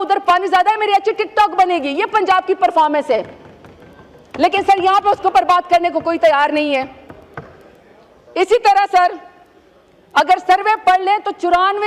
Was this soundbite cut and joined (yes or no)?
no